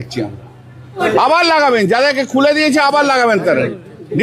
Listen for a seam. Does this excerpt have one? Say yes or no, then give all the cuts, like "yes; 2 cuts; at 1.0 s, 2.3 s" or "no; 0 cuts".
yes; 1 cut; at 1.0 s